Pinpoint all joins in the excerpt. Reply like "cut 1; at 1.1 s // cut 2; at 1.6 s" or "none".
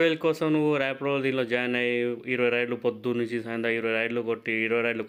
none